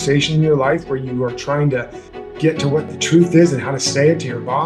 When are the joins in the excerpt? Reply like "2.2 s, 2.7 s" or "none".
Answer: none